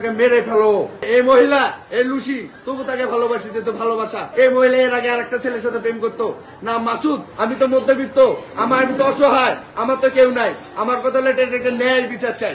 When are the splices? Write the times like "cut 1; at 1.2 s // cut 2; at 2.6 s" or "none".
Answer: cut 1; at 1.1 s // cut 2; at 7.3 s